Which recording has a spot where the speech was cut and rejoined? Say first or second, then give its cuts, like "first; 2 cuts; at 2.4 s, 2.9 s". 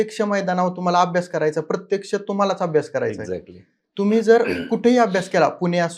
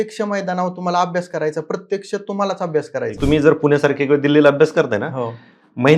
second; 1 cut; at 3.2 s